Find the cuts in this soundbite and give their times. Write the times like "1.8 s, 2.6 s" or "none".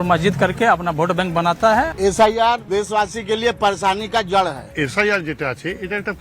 1.9 s, 2.7 s, 4.7 s